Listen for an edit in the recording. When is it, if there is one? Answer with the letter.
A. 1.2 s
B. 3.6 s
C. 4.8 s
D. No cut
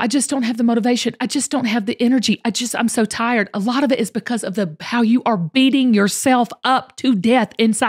D